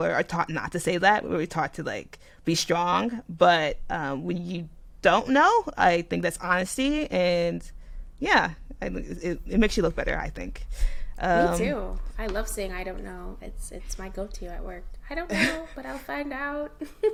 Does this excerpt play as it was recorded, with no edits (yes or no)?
yes